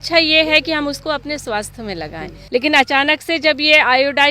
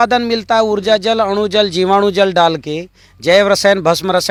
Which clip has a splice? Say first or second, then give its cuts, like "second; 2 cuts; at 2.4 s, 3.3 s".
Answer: first; 1 cut; at 2.3 s